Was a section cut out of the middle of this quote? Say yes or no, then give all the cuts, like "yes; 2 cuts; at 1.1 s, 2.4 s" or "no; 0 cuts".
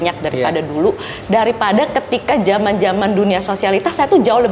no; 0 cuts